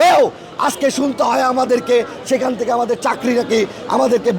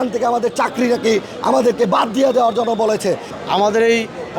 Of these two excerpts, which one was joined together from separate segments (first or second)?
second